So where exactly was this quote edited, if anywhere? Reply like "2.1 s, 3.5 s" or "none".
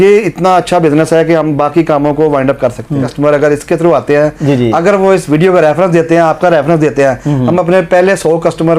3.1 s